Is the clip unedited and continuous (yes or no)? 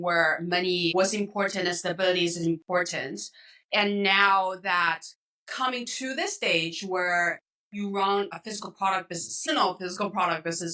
no